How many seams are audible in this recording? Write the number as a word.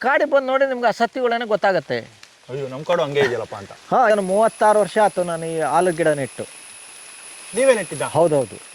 one